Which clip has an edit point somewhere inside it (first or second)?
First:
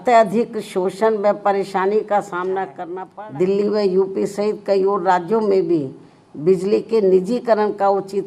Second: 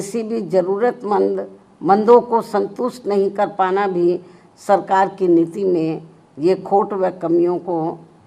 first